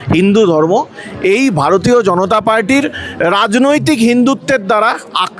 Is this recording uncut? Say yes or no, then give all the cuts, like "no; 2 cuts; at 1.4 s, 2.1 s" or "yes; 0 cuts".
yes; 0 cuts